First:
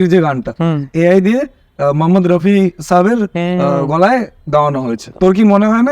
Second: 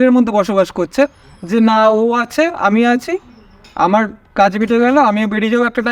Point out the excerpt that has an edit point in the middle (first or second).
first